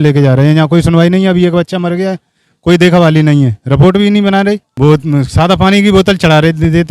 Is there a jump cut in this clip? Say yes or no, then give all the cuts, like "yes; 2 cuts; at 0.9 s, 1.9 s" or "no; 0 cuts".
no; 0 cuts